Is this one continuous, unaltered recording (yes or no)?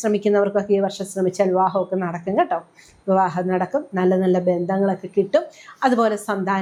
yes